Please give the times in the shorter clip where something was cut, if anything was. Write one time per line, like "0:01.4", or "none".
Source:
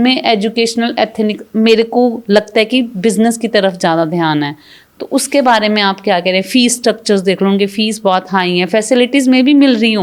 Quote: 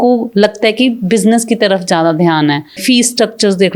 0:02.8